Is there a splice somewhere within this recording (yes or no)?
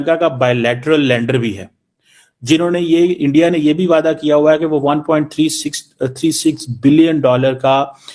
no